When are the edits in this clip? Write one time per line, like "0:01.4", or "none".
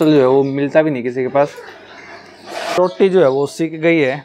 0:02.8